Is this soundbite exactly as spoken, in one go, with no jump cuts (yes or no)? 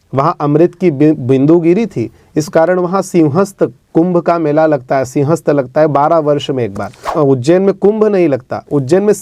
no